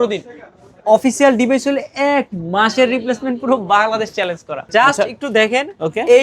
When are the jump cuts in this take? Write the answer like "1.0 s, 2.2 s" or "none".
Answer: 4.6 s